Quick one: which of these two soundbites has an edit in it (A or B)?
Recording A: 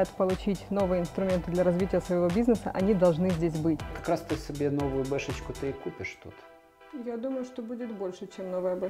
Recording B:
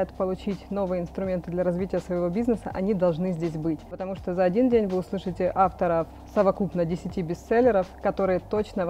A